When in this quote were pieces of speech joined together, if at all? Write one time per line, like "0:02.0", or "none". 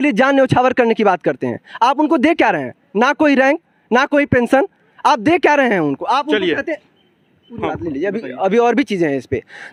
none